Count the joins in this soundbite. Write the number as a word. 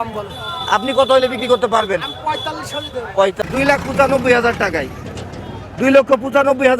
one